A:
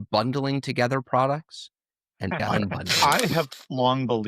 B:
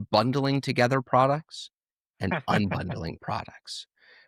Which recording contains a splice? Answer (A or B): A